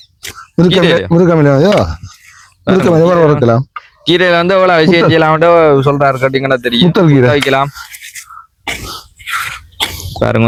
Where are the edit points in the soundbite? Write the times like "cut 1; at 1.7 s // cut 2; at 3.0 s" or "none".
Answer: none